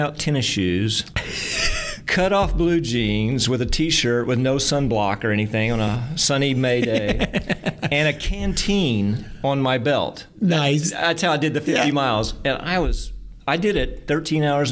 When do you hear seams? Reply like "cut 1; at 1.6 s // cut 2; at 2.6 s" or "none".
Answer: none